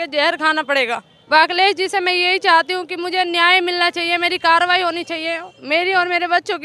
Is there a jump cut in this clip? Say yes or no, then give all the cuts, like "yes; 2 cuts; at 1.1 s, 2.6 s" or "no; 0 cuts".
yes; 1 cut; at 1.1 s